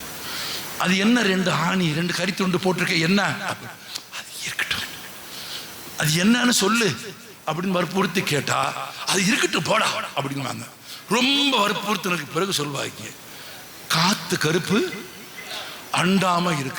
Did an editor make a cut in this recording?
no; 0 cuts

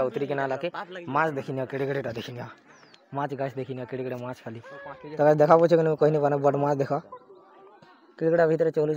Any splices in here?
no; 0 cuts

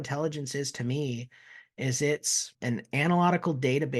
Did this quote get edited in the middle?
yes; 1 cut; at 2.5 s

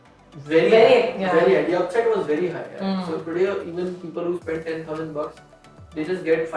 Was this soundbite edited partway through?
no; 0 cuts

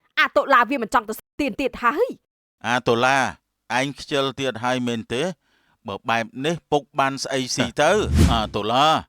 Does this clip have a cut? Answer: yes; 1 cut; at 8.2 s

